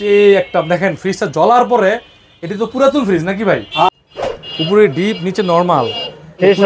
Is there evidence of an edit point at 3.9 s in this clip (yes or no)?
yes